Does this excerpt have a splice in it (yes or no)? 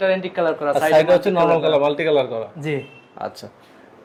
no